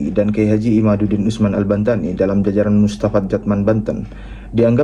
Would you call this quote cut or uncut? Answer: uncut